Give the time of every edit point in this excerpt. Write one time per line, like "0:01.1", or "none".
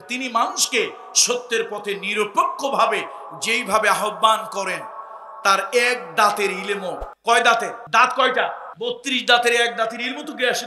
0:07.1
0:07.8
0:08.7